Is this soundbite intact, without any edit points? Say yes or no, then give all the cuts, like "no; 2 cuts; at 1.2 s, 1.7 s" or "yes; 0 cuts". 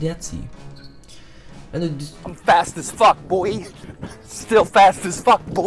yes; 0 cuts